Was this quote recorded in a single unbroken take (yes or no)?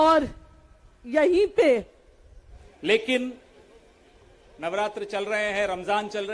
no